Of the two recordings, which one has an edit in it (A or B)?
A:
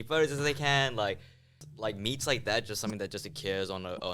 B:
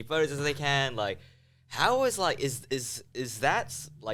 A